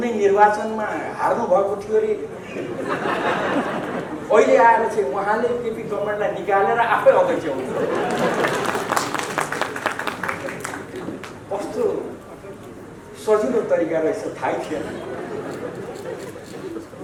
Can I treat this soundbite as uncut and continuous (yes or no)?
yes